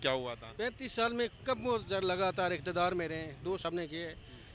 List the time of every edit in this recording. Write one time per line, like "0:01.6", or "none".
0:03.6